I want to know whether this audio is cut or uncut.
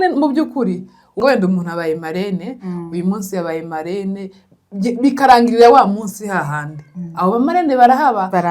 cut